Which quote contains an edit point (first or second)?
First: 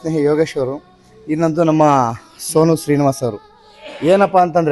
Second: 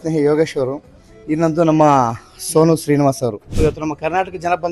second